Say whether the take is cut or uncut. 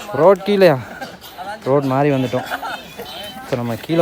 uncut